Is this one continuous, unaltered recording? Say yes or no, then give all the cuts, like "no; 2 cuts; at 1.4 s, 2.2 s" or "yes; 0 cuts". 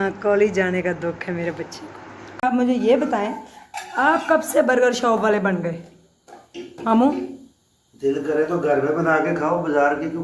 no; 1 cut; at 2.4 s